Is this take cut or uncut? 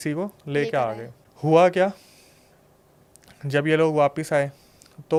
uncut